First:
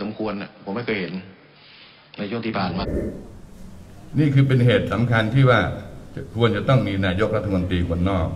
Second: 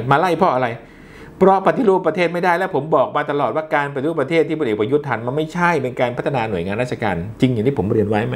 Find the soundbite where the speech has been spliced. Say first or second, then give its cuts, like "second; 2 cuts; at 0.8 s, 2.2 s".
first; 1 cut; at 2.8 s